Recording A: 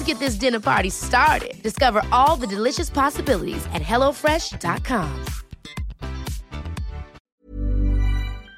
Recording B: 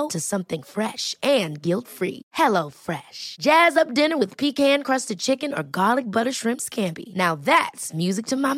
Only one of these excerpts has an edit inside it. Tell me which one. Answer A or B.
A